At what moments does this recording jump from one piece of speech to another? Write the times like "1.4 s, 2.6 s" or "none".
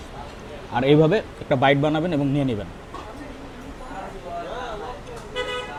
none